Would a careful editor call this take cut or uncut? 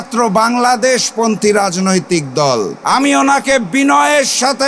cut